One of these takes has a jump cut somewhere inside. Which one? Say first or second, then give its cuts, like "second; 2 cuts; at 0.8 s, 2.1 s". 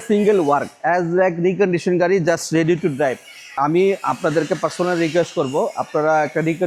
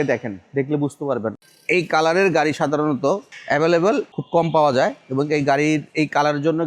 second; 3 cuts; at 1.3 s, 3.3 s, 4.2 s